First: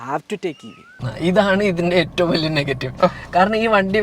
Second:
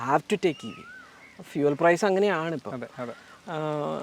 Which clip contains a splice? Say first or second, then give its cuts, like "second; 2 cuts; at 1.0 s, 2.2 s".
first; 1 cut; at 1.0 s